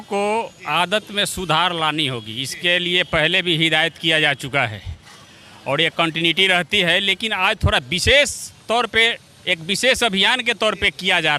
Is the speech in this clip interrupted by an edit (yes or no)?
no